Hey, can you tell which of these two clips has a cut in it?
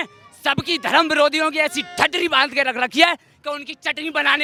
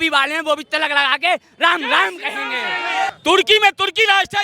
second; 1 cut; at 3.1 s

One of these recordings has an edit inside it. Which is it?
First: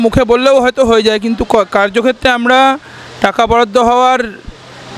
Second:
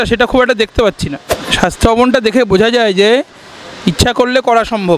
second; 1 cut; at 1.4 s

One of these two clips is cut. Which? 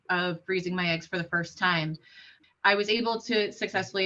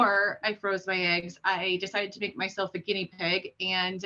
first; 1 cut; at 2.3 s

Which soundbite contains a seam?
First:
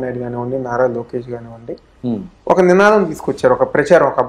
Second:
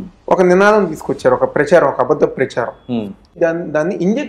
second; 1 cut; at 3.2 s

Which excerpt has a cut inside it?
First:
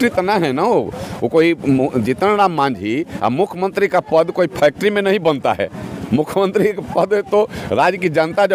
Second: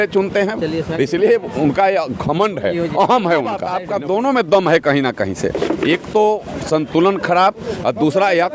second; 1 cut; at 3.8 s

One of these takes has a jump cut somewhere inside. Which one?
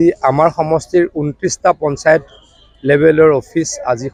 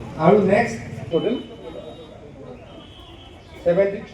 second; 1 cut; at 1.7 s

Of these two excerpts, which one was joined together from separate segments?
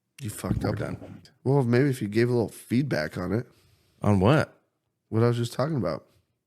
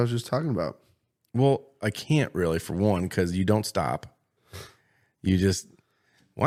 first; 1 cut; at 1.3 s

